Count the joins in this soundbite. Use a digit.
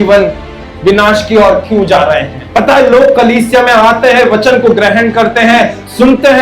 1